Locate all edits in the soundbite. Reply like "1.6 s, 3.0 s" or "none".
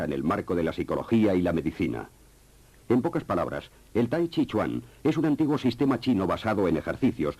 3.2 s